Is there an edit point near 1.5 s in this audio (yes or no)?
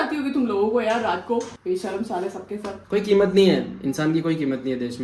no